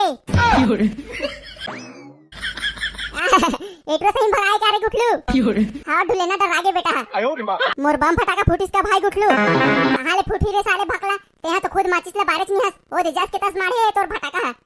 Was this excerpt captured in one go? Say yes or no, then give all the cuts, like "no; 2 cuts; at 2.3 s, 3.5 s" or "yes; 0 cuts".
yes; 0 cuts